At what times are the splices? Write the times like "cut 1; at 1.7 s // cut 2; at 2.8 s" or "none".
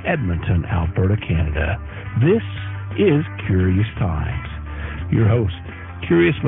none